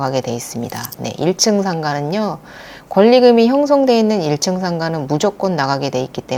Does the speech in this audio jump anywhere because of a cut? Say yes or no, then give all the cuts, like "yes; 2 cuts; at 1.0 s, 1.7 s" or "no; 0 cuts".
no; 0 cuts